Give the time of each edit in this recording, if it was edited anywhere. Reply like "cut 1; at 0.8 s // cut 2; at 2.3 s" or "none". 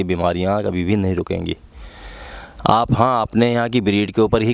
none